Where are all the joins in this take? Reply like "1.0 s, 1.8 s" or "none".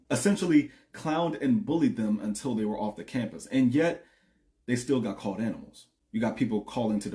none